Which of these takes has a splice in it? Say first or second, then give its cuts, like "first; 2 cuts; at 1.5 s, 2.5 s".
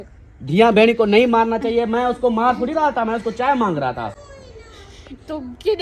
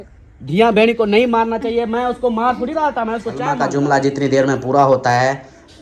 second; 1 cut; at 3.6 s